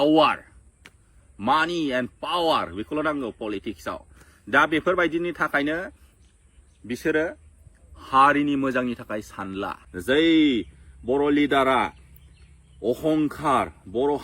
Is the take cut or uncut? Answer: cut